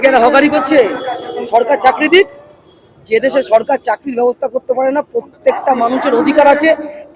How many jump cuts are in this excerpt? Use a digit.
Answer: 0